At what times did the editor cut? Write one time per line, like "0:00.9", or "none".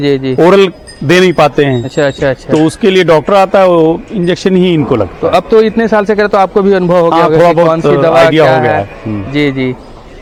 none